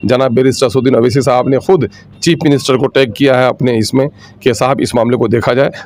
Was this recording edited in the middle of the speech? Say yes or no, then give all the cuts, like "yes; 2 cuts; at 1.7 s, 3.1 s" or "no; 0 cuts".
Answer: no; 0 cuts